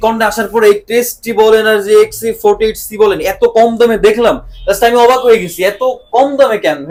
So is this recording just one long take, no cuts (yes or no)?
yes